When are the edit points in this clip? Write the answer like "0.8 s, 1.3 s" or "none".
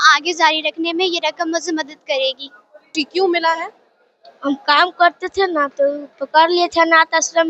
2.9 s